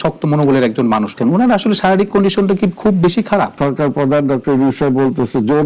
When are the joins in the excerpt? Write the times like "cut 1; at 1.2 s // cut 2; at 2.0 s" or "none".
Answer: cut 1; at 1.2 s // cut 2; at 3.5 s